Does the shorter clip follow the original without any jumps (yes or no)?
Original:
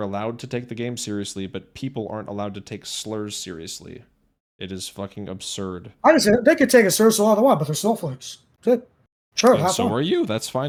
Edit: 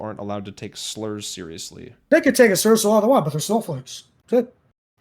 no